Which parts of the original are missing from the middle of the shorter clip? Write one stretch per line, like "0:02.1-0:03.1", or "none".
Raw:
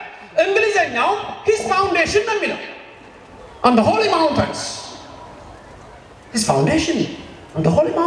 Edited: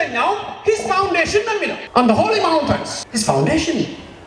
0:02.6-0:03.5
0:04.6-0:06.2